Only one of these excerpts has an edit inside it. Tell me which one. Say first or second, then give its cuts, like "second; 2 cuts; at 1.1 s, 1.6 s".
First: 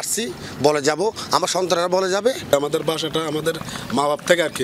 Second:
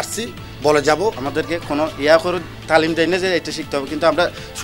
second; 1 cut; at 1.2 s